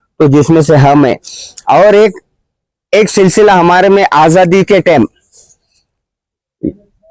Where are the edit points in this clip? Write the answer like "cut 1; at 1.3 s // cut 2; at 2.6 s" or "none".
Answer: none